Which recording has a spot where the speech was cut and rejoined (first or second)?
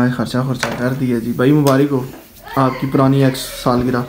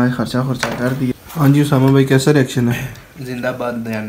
second